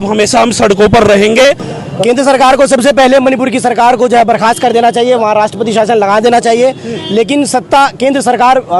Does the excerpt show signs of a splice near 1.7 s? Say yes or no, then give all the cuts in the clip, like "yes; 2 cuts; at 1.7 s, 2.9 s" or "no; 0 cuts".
yes; 1 cut; at 1.7 s